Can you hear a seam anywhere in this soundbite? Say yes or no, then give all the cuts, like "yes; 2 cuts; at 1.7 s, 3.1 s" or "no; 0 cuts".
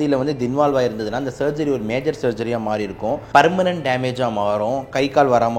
yes; 1 cut; at 3.2 s